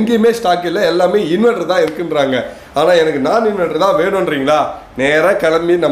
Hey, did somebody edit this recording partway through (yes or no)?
no